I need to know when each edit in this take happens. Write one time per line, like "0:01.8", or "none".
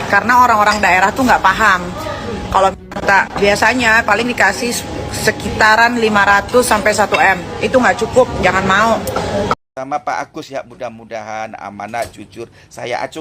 0:09.6